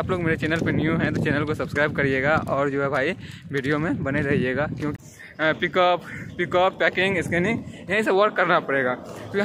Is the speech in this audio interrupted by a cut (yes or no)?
yes